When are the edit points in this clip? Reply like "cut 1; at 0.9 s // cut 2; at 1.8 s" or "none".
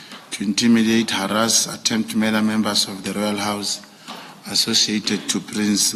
none